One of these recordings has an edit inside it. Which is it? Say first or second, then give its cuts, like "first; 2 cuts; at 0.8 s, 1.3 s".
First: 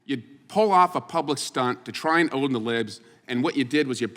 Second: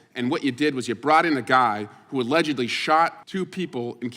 second; 1 cut; at 3.2 s